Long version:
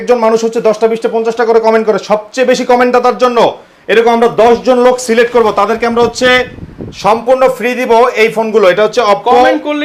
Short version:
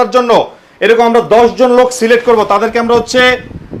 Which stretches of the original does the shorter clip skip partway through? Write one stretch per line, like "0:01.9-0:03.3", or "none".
none